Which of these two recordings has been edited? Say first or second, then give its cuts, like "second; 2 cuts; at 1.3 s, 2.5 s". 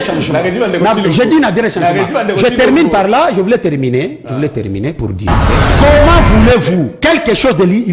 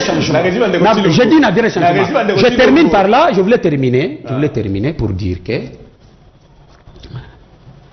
first; 1 cut; at 5.7 s